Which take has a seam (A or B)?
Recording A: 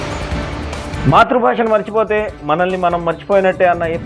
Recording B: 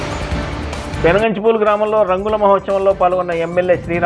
B